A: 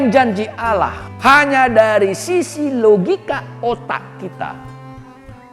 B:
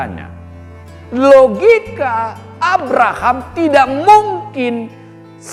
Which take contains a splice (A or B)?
A